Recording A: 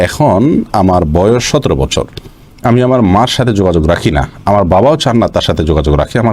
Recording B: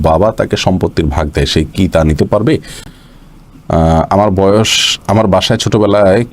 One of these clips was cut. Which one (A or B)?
B